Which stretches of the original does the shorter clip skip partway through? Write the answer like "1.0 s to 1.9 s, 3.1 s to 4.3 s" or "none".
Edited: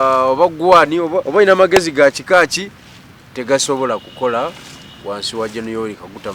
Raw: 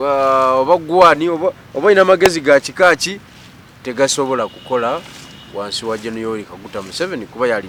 1.5 s to 1.7 s

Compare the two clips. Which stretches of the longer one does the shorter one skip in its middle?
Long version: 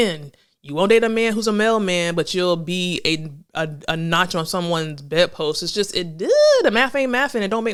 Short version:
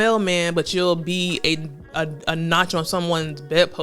none

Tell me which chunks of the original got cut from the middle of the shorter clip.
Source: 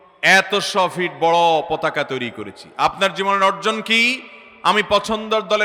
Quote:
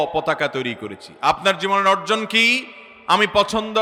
none

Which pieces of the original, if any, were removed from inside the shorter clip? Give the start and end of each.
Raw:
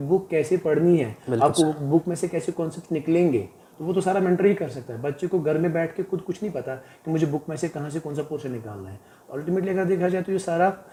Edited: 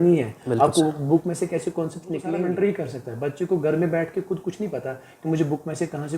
3.1 s to 4.1 s

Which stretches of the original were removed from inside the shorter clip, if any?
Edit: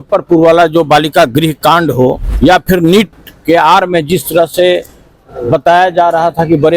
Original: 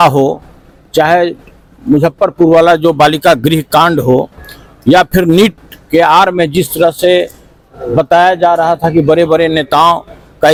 4.3 s to 4.7 s

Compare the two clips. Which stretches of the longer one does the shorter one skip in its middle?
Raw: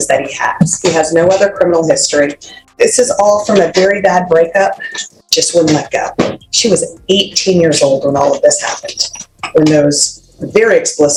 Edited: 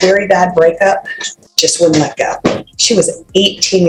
none

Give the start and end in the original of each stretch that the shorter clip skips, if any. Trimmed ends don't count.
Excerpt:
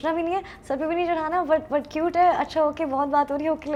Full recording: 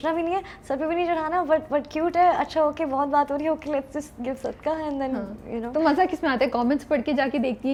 none

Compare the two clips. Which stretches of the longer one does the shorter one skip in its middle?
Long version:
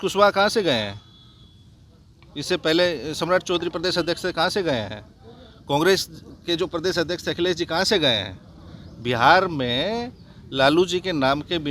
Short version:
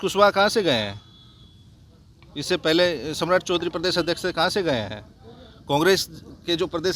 none

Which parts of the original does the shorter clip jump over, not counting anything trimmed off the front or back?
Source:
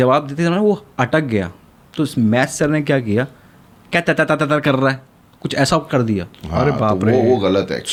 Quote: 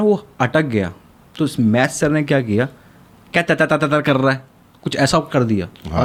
none

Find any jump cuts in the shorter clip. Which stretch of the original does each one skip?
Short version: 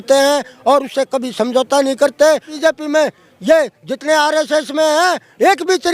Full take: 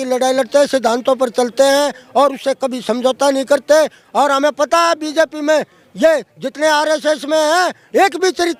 4.0 s to 5.0 s

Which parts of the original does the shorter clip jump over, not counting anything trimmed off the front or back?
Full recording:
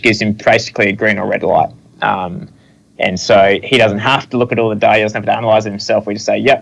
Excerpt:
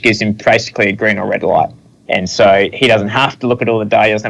1.8 s to 2.7 s

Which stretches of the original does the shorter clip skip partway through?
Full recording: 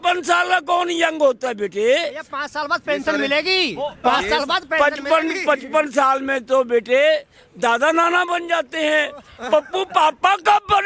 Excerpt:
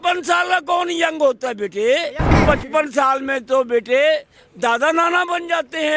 2.4 s to 5.4 s

